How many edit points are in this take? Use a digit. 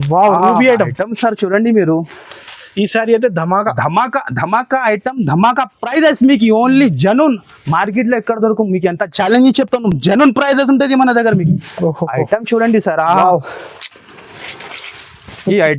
0